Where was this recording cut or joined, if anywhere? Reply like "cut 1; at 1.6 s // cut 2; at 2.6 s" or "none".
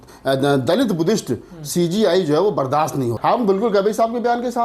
cut 1; at 3.2 s